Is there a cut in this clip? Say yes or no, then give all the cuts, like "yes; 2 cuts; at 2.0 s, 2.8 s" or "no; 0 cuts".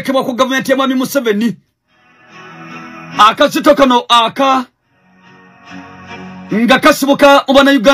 no; 0 cuts